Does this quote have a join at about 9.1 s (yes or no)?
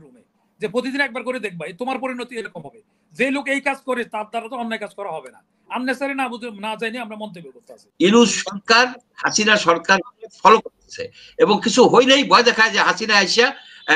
no